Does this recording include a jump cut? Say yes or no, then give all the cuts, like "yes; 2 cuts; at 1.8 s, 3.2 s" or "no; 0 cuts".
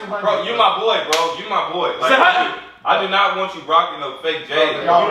no; 0 cuts